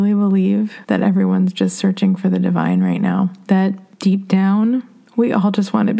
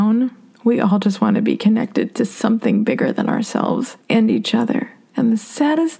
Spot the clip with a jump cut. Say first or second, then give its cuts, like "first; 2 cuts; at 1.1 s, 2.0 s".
second; 2 cuts; at 4.0 s, 5.0 s